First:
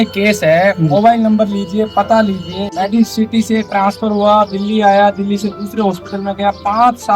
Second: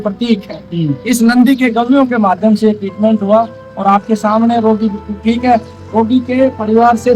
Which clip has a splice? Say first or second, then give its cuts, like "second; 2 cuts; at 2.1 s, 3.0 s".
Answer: first; 1 cut; at 2.6 s